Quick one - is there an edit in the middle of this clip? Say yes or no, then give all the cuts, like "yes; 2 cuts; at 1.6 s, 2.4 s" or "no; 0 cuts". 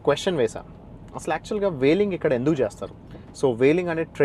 no; 0 cuts